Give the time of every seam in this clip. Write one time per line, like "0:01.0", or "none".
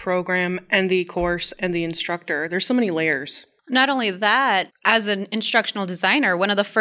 0:04.7